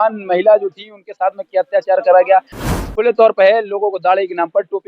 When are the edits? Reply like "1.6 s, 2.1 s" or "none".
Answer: 2.7 s